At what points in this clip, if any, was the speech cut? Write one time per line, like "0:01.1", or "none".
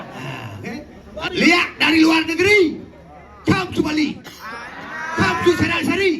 0:01.0